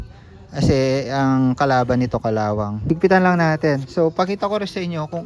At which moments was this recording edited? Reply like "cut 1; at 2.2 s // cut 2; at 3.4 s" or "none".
cut 1; at 2.7 s